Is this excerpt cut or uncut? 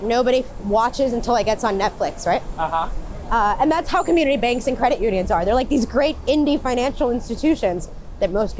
uncut